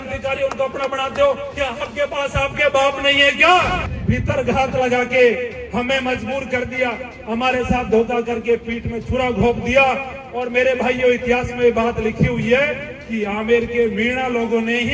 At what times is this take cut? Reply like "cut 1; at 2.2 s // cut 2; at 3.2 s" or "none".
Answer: cut 1; at 3.9 s